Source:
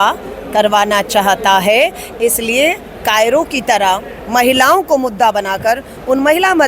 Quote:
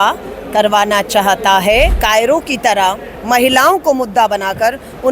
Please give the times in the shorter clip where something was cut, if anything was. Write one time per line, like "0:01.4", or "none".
0:02.0